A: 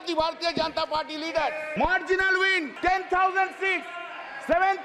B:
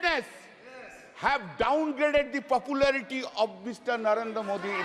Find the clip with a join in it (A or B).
A